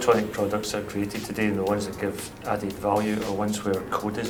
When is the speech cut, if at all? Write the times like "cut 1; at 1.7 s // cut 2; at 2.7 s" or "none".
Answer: none